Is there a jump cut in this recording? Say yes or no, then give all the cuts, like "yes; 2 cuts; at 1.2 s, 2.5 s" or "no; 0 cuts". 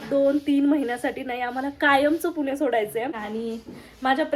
yes; 1 cut; at 3.2 s